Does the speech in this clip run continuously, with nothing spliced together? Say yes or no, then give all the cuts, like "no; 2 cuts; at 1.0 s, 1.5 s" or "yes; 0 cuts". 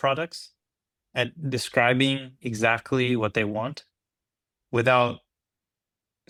yes; 0 cuts